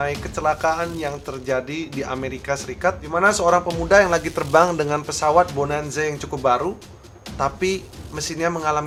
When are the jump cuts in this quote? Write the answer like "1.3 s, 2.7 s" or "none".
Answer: none

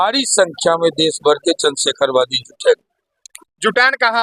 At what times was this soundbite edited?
none

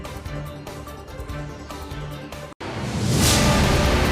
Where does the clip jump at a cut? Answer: none

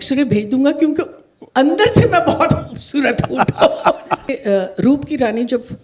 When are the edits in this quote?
4.3 s

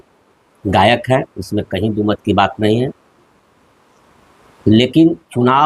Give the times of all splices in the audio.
none

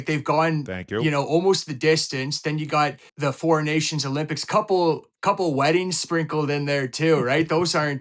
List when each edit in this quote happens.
3.1 s

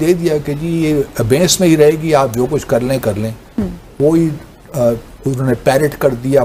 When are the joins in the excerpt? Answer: none

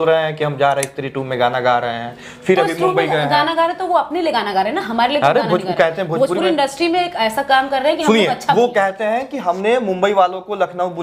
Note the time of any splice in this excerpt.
none

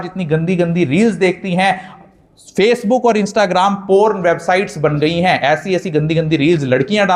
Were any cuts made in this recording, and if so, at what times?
none

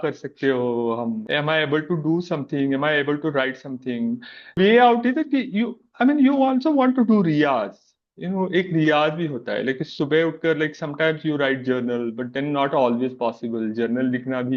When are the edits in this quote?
1.2 s, 4.5 s

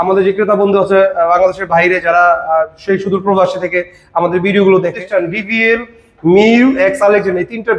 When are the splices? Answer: 5.0 s

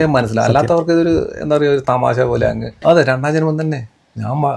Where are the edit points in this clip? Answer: 2.8 s

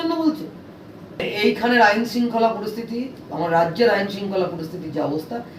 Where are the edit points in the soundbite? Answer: 1.1 s

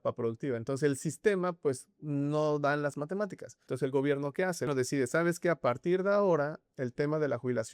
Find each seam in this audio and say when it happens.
3.6 s, 4.7 s

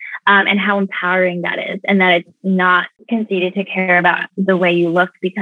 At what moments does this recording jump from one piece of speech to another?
2.9 s

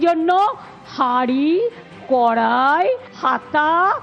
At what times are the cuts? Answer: 3.1 s

